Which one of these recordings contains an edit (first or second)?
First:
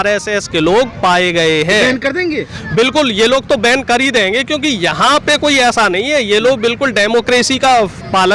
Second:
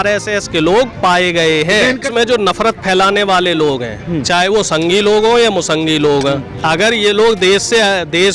second